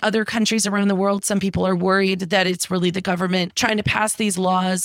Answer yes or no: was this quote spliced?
yes